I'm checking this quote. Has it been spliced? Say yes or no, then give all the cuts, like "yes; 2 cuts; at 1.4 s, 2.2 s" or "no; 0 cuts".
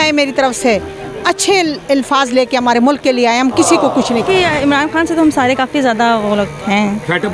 yes; 1 cut; at 4.2 s